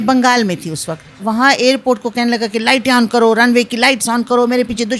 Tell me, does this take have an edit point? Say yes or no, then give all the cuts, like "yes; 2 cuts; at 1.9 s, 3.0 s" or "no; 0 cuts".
yes; 1 cut; at 1.2 s